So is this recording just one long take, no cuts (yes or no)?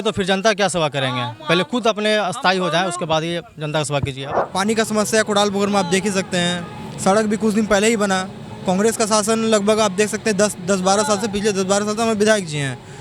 no